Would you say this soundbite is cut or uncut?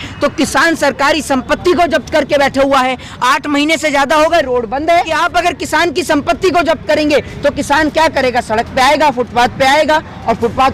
cut